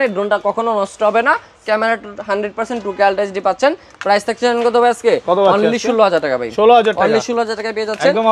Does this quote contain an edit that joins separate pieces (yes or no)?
no